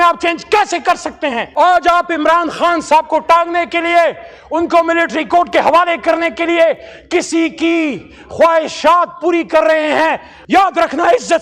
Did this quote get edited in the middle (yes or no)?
yes